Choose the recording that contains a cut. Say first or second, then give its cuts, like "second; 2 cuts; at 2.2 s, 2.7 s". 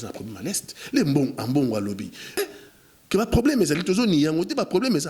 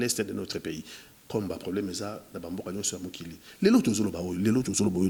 first; 1 cut; at 2.4 s